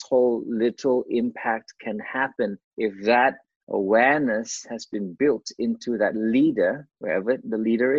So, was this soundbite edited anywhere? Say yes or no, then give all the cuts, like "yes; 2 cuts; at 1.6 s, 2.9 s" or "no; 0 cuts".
yes; 2 cuts; at 2.6 s, 6.9 s